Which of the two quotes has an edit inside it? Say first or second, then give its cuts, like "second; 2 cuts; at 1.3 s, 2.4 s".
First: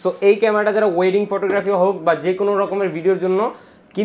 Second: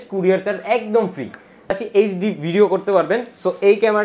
second; 1 cut; at 1.7 s